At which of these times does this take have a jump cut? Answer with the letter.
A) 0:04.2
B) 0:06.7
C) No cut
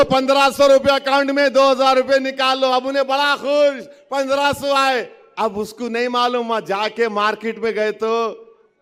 C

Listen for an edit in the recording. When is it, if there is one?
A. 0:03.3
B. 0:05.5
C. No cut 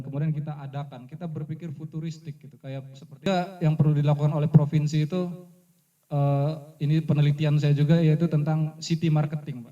A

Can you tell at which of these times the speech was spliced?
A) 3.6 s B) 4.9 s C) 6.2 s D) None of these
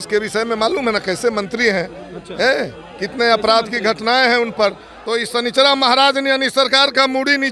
B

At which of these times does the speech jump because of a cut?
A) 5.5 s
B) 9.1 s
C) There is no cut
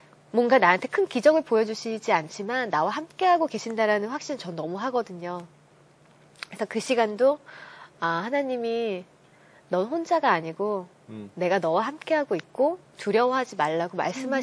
C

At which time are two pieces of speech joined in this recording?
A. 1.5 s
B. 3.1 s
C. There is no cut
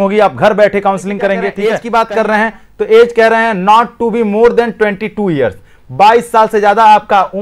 A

